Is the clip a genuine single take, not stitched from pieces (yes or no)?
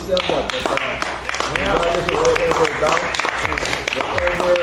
yes